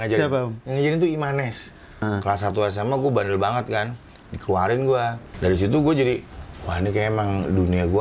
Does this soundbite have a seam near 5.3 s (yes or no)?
yes